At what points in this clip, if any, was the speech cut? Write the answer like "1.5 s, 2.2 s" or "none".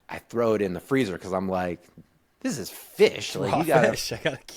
none